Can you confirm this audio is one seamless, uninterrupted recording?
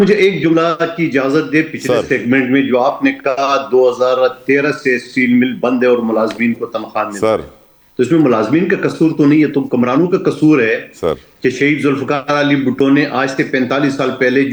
yes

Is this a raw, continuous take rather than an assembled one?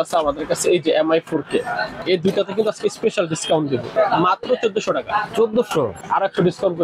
no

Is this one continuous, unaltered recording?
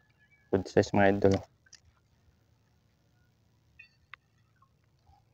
yes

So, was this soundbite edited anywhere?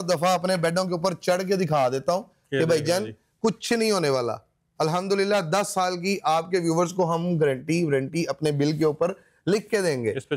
no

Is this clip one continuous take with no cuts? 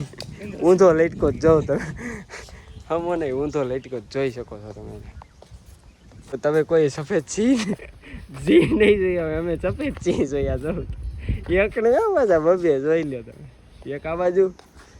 no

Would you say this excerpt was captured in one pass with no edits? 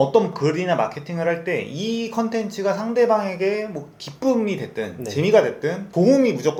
yes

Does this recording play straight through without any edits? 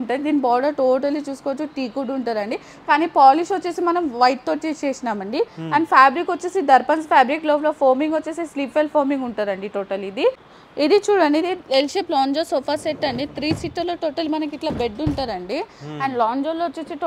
no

